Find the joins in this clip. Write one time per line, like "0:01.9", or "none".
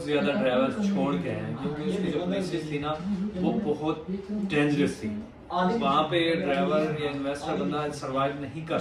none